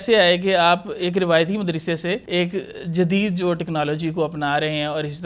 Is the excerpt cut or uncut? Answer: cut